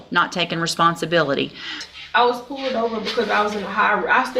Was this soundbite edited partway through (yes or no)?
yes